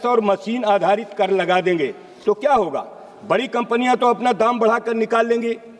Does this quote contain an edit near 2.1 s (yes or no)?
no